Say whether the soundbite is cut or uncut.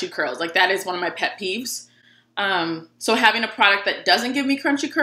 uncut